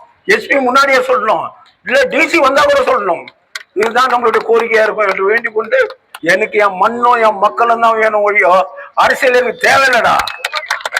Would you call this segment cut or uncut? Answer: cut